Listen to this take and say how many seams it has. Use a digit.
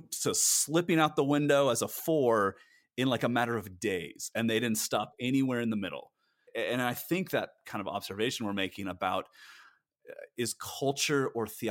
2